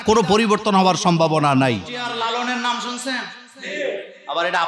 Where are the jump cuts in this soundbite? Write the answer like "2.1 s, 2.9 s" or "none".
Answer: 2.0 s